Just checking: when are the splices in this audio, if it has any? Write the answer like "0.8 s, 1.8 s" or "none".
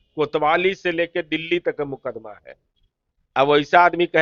none